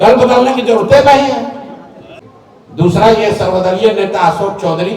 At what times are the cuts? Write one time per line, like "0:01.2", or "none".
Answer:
0:02.1